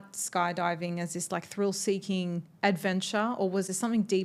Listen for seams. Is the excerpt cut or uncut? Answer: uncut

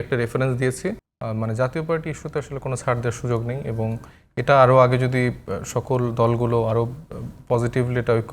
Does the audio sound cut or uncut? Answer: cut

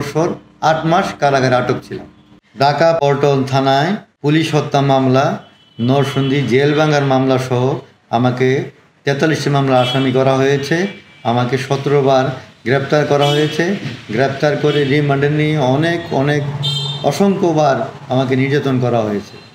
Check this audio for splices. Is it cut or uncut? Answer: uncut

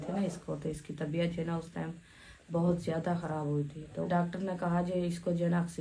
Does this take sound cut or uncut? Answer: cut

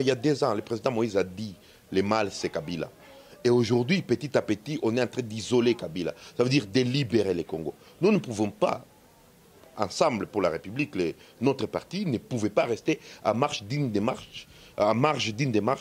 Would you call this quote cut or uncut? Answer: uncut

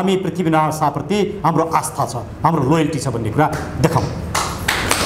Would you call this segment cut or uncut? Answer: uncut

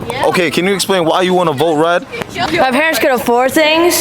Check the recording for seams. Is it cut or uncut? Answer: cut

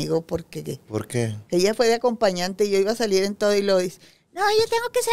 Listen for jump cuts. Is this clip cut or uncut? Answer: uncut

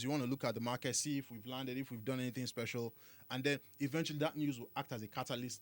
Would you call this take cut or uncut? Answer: uncut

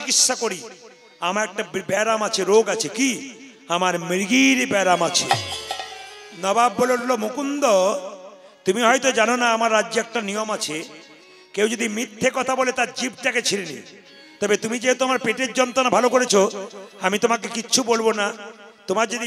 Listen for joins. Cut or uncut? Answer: uncut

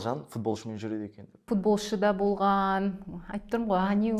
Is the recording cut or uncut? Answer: cut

